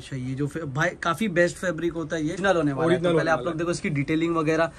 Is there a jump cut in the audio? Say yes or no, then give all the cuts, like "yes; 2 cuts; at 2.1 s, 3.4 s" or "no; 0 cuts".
yes; 1 cut; at 2.4 s